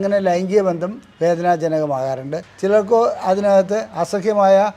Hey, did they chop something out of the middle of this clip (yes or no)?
yes